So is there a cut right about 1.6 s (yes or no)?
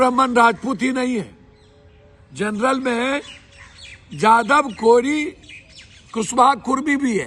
no